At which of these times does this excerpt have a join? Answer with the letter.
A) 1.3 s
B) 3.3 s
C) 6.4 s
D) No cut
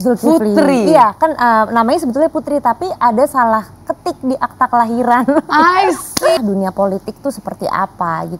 C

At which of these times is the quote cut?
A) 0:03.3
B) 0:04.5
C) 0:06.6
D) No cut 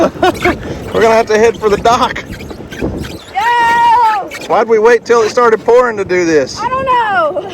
D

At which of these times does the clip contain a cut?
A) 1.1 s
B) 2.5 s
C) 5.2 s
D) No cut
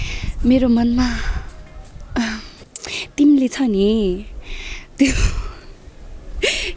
B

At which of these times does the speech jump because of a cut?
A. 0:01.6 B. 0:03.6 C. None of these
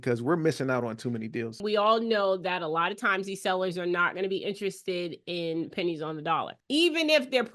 A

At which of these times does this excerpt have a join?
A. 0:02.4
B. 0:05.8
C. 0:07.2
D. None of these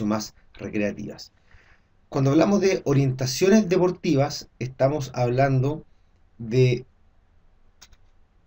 D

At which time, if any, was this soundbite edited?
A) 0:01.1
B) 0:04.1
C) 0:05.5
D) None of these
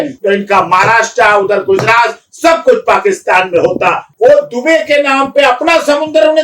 B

